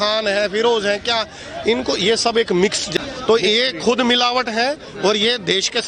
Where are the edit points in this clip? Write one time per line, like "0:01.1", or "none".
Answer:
0:02.9